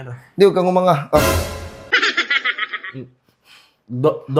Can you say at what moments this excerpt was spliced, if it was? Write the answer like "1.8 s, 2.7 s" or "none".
none